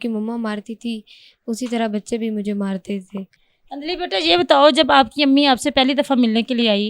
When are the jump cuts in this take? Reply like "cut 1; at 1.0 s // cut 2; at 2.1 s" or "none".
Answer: none

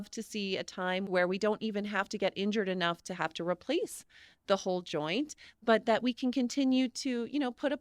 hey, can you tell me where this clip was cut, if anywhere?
cut 1; at 1.1 s

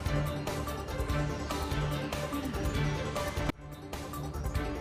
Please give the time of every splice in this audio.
none

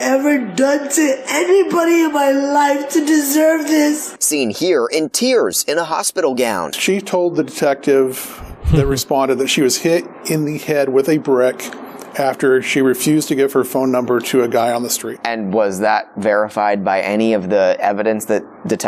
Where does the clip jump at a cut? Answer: none

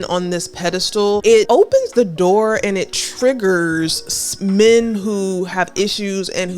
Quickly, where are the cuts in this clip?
cut 1; at 1.4 s

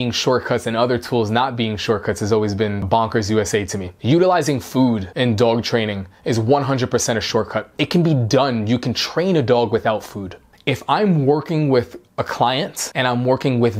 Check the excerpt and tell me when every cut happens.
cut 1; at 2.8 s // cut 2; at 5.1 s // cut 3; at 7.6 s // cut 4; at 10.5 s

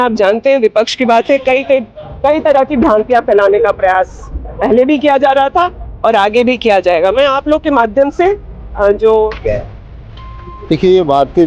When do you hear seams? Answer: cut 1; at 9.4 s

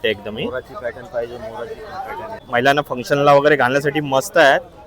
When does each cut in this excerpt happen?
cut 1; at 2.4 s

